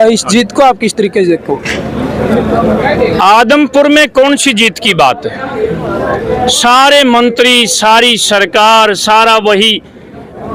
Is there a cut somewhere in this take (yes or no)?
no